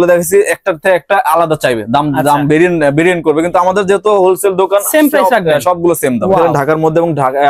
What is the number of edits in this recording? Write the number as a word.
one